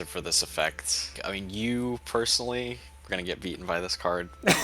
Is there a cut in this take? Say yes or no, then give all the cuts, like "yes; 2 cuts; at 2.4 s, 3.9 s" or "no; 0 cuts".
yes; 1 cut; at 1.2 s